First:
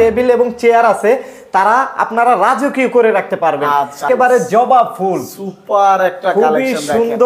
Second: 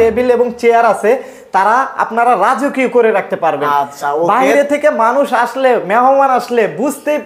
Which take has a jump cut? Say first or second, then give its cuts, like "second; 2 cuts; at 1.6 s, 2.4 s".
first; 1 cut; at 4.0 s